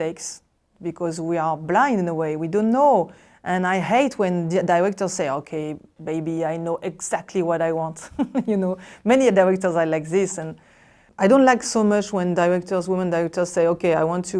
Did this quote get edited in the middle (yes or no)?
yes